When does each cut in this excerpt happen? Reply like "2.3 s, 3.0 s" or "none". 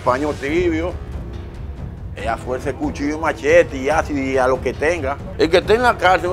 5.2 s